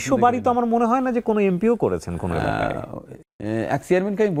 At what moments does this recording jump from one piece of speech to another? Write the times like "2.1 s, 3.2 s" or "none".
none